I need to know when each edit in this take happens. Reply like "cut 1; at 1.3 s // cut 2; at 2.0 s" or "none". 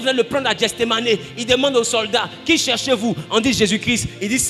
none